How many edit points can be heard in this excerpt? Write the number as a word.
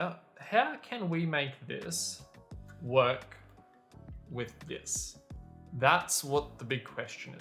zero